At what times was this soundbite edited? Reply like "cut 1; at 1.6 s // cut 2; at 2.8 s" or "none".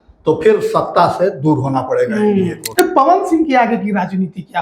cut 1; at 2.6 s